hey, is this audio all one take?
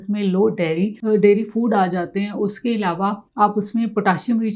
no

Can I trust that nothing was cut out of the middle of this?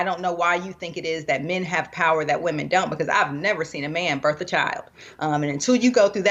yes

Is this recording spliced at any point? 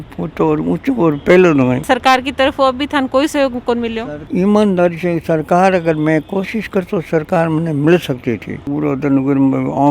yes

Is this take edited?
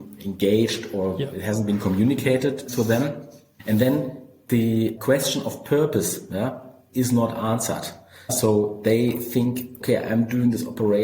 yes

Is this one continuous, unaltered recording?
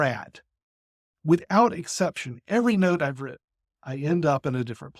no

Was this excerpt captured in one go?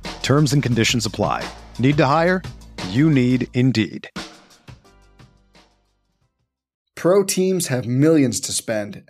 no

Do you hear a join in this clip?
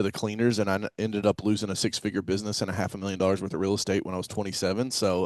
no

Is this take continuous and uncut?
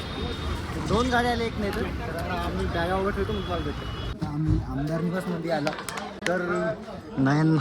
no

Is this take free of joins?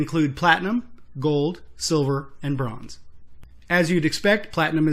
yes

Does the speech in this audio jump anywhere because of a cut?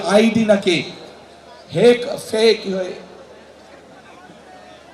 no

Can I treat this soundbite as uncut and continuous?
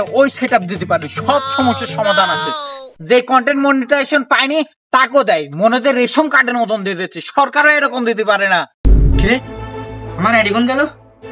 no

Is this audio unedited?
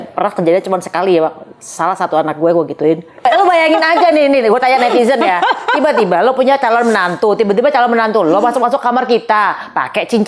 no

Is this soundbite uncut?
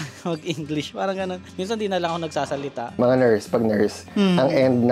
no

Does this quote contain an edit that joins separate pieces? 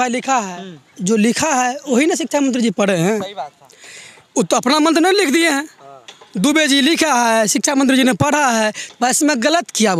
no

